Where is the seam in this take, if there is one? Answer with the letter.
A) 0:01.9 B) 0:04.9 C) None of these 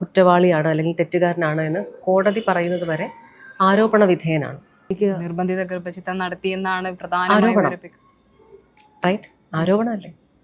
B